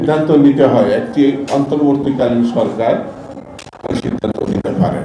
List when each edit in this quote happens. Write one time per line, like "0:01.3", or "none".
none